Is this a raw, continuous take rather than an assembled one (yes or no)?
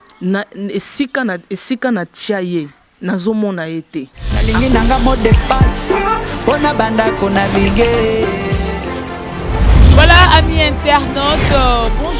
no